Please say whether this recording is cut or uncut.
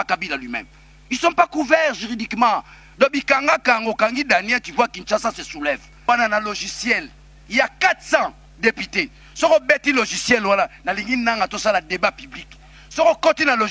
cut